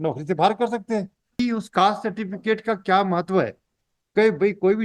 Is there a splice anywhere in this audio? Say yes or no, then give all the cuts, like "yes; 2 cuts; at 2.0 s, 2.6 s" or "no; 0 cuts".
yes; 1 cut; at 1.4 s